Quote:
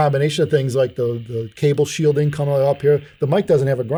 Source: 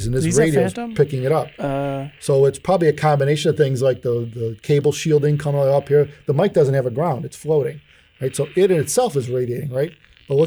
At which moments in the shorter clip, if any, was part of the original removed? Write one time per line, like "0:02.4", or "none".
none